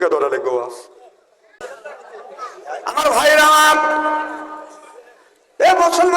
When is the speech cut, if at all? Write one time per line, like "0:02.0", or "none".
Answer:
0:01.6